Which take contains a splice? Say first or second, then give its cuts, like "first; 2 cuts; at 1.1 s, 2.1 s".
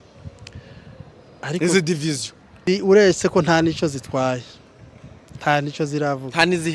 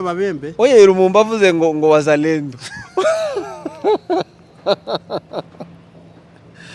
first; 1 cut; at 2.6 s